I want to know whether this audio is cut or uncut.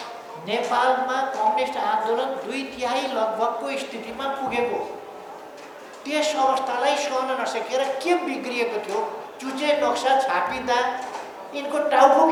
uncut